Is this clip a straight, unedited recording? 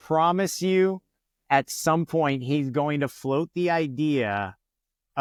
yes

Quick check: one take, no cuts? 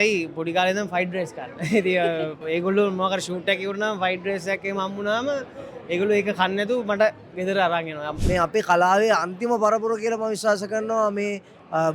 no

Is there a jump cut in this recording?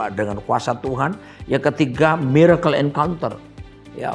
no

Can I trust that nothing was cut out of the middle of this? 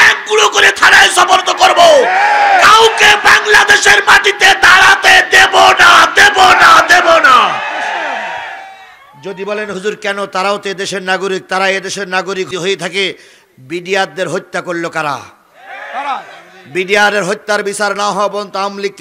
yes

